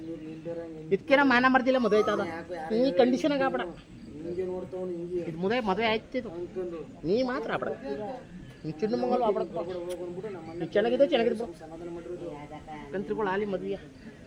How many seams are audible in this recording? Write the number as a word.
zero